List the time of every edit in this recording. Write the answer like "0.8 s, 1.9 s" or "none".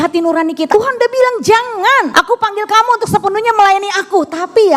0.7 s, 2.1 s